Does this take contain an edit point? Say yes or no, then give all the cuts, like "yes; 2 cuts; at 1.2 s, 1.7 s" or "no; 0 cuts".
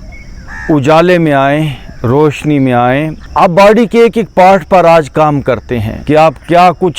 yes; 2 cuts; at 3.2 s, 5.9 s